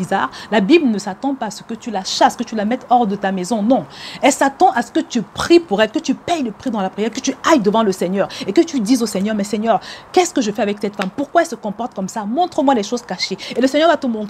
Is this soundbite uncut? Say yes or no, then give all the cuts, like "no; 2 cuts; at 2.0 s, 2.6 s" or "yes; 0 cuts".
yes; 0 cuts